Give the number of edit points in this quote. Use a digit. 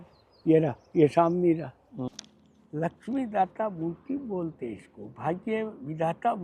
1